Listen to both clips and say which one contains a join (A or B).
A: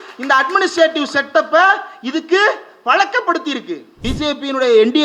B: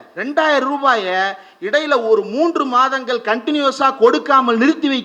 A